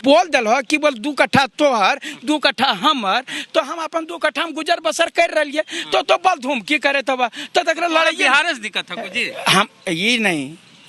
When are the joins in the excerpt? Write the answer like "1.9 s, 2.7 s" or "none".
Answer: none